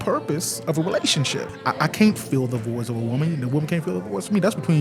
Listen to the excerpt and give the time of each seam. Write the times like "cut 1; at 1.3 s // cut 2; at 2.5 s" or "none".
cut 1; at 1.6 s